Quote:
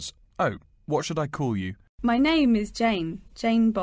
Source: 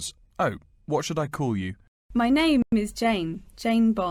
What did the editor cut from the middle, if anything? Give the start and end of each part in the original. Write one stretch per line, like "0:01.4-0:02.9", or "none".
0:01.8-0:01.9
0:02.6-0:02.7